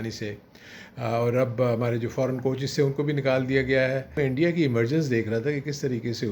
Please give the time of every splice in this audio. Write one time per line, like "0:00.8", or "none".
0:04.1